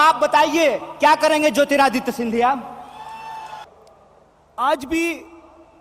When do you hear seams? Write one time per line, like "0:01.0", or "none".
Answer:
0:03.6